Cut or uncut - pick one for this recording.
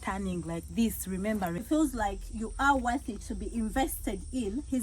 cut